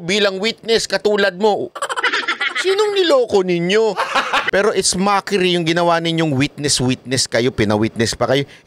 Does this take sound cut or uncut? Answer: cut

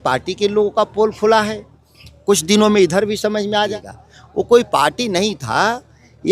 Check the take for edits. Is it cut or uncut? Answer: cut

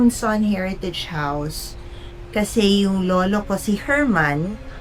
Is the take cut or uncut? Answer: uncut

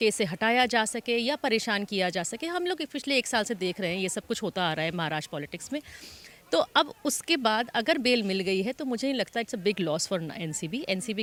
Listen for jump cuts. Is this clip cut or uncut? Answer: uncut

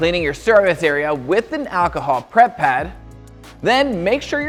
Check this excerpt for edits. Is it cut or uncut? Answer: uncut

